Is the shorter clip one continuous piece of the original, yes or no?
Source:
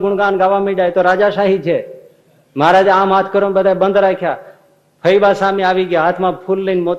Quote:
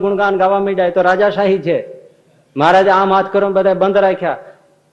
yes